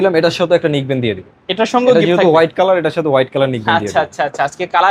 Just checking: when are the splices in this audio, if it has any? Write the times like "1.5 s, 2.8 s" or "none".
none

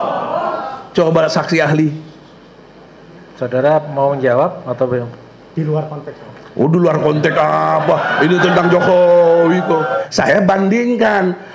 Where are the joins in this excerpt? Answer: 10.0 s

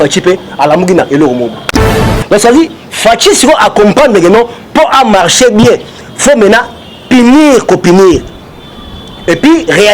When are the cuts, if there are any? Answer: 2.1 s

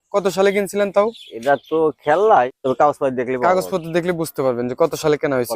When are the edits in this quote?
2.5 s

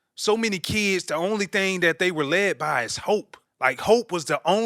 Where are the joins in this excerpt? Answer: 3.4 s

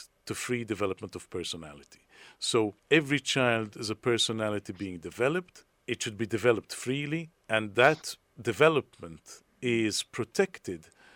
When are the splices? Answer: 2.8 s

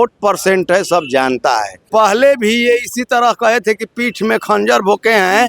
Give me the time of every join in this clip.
1.8 s

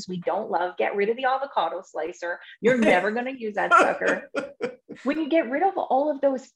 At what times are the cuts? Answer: 4.9 s

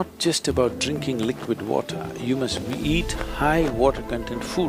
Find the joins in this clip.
none

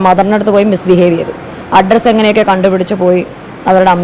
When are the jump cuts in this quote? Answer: none

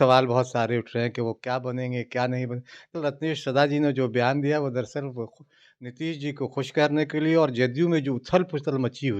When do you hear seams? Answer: 3.0 s

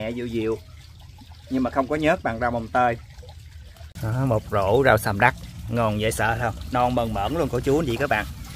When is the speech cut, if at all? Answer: none

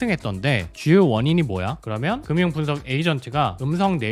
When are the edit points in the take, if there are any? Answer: 1.8 s

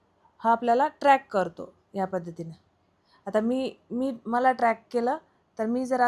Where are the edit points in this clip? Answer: none

